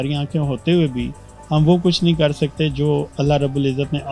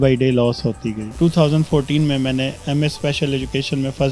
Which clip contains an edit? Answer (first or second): second